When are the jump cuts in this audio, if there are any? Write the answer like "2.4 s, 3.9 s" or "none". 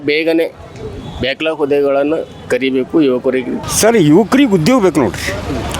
3.6 s